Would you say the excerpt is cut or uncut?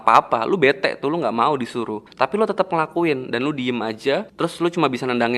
cut